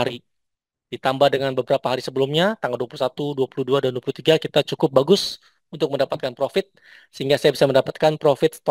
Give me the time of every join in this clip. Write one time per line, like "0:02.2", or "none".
none